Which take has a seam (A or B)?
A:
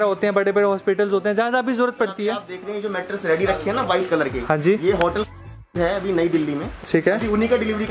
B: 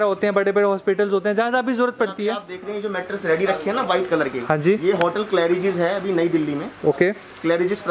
A